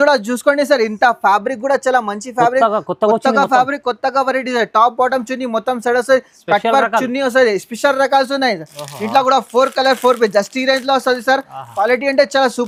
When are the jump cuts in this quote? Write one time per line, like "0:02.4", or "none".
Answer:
none